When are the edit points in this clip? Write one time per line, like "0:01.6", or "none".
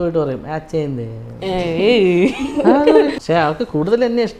0:03.2